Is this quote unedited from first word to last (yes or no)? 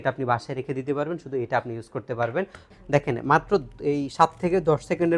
no